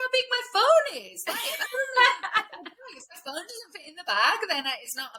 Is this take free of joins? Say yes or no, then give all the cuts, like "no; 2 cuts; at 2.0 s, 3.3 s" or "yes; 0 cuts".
yes; 0 cuts